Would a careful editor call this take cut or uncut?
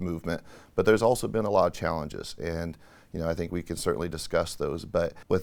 uncut